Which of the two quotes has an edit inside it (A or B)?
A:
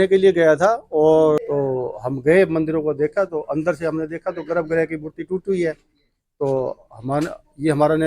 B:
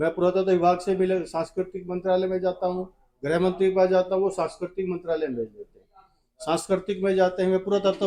A